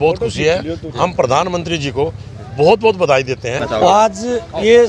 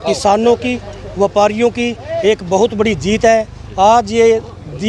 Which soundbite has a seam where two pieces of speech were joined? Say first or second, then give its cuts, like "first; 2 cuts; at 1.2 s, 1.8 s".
first; 1 cut; at 3.6 s